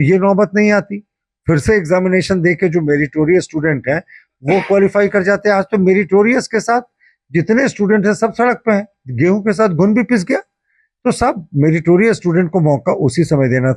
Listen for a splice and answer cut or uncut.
uncut